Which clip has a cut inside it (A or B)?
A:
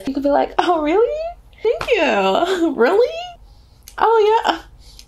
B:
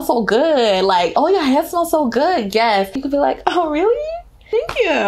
B